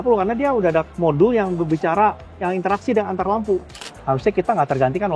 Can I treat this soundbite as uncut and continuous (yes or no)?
no